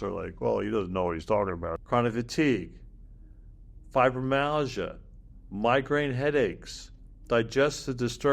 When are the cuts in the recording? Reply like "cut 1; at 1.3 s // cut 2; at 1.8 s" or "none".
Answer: cut 1; at 1.8 s